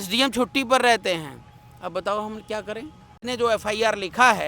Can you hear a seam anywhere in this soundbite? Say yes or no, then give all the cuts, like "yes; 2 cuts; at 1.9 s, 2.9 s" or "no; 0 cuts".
yes; 1 cut; at 3.2 s